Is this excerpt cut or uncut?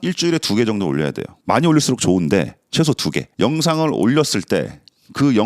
uncut